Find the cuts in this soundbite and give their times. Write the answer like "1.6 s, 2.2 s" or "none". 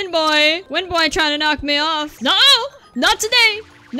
2.1 s